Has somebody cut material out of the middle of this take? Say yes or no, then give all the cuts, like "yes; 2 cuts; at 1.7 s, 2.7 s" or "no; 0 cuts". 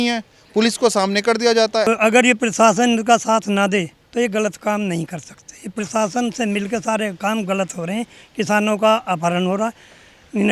yes; 1 cut; at 1.8 s